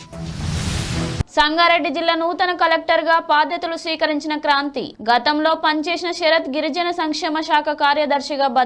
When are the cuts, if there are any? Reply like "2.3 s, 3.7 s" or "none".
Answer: 0.9 s